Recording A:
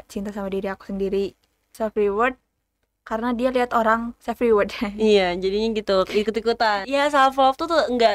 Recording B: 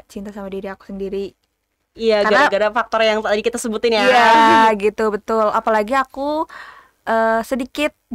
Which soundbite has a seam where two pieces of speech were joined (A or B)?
A